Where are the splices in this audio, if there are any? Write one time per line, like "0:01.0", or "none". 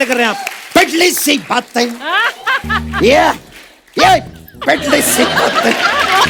none